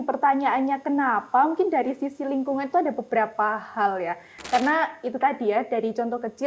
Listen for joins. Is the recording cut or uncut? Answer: cut